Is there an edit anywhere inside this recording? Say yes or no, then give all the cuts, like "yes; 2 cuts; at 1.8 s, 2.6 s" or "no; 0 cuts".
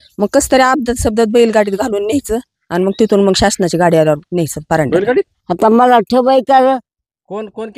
yes; 1 cut; at 5.4 s